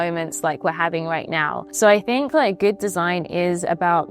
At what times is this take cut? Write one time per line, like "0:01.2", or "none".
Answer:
0:01.6